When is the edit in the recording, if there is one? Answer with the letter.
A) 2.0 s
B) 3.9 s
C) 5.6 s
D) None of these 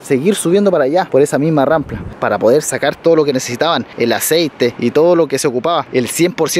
A